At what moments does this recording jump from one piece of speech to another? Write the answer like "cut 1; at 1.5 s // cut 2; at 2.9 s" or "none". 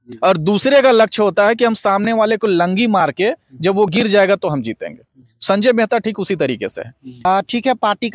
cut 1; at 7.1 s